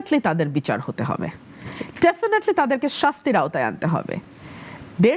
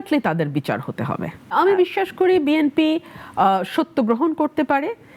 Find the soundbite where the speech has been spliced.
second; 1 cut; at 1.5 s

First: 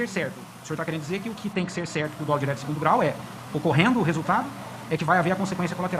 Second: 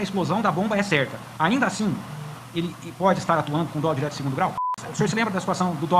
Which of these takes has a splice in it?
second; 2 cuts; at 1.2 s, 4.8 s

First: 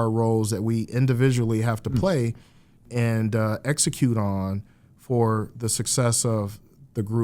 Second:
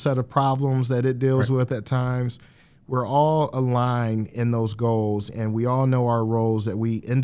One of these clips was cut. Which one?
first; 1 cut; at 2.8 s

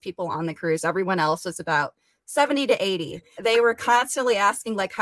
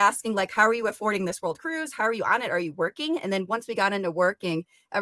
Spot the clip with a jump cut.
first; 1 cut; at 3.3 s

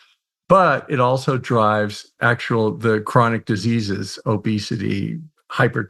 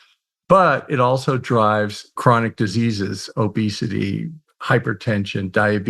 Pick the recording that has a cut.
second; 1 cut; at 2.2 s

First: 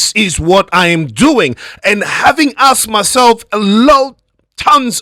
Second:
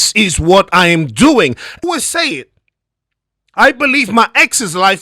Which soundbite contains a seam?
second; 1 cut; at 1.8 s

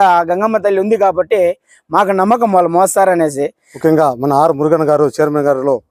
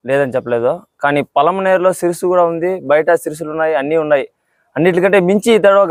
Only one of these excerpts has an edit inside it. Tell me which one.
first; 1 cut; at 3.6 s

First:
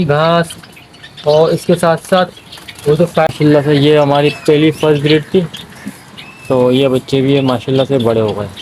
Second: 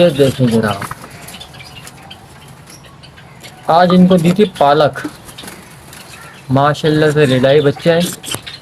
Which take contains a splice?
first; 1 cut; at 3.3 s

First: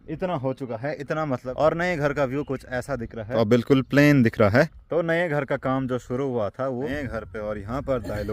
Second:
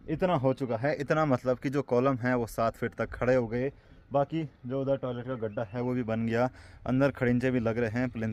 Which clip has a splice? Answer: first; 4 cuts; at 1.5 s, 3.3 s, 4.9 s, 6.9 s

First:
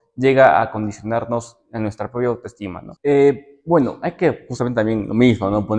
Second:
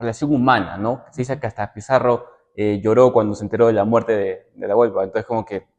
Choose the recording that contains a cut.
first; 1 cut; at 2.8 s

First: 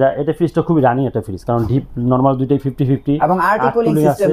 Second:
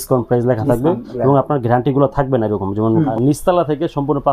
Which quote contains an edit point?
second; 1 cut; at 3.1 s

